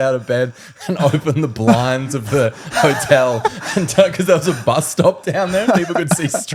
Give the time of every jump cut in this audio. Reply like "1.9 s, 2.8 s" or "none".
none